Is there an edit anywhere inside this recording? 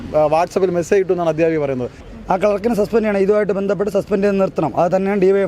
yes; 1 cut; at 2.0 s

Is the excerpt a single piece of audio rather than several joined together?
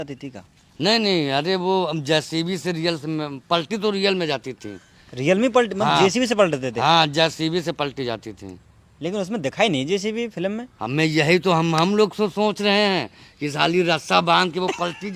yes; 0 cuts

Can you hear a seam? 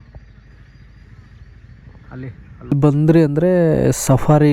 yes; 1 cut; at 2.7 s

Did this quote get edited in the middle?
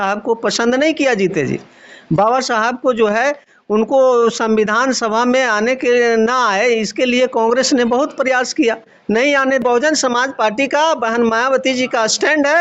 yes; 1 cut; at 9.6 s

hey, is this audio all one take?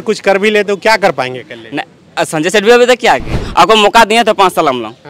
no; 1 cut; at 3.3 s

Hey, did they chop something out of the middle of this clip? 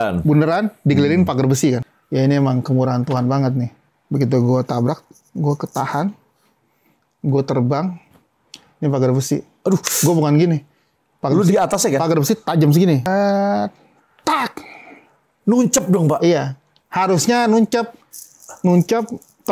yes; 2 cuts; at 1.8 s, 13.0 s

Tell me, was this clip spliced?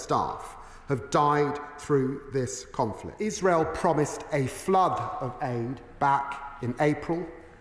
yes; 1 cut; at 3.1 s

